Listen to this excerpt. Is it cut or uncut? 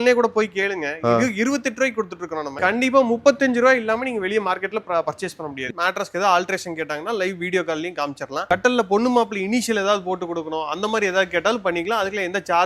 cut